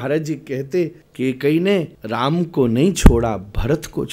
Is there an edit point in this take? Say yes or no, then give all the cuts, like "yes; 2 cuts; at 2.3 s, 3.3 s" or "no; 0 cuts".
yes; 2 cuts; at 1.0 s, 2.0 s